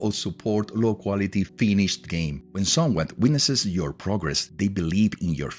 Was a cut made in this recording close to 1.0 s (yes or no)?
no